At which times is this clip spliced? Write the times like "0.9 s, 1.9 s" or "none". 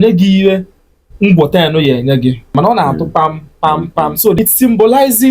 2.5 s, 4.4 s